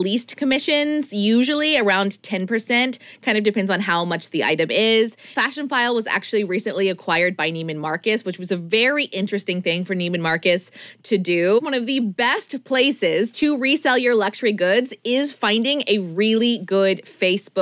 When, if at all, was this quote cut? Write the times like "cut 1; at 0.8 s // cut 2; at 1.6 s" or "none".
cut 1; at 5.3 s // cut 2; at 11.6 s